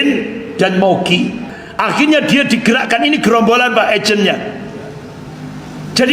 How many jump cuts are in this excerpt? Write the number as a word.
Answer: one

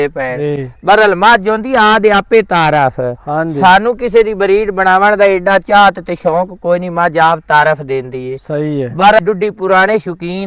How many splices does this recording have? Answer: one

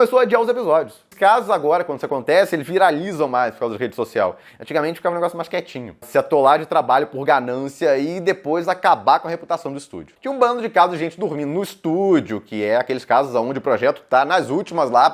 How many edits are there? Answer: three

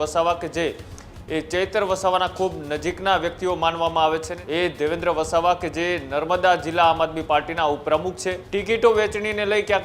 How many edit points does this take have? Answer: two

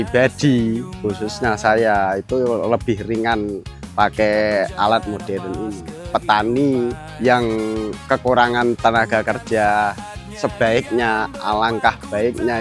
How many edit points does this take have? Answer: two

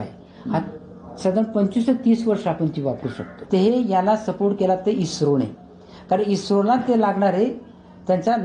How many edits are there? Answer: one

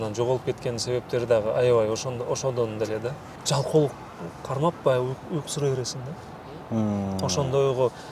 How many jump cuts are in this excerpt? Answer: one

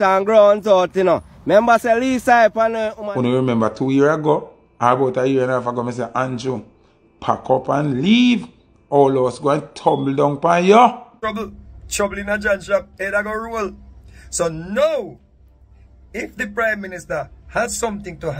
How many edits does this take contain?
two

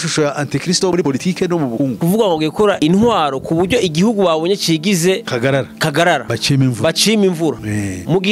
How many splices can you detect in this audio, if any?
one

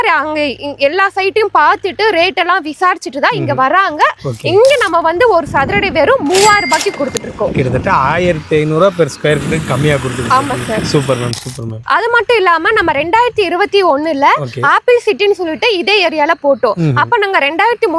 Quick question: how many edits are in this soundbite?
zero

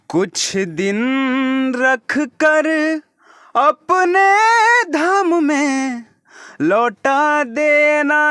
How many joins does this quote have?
zero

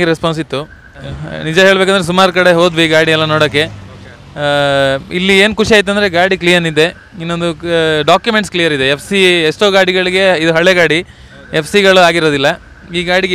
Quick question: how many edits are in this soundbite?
one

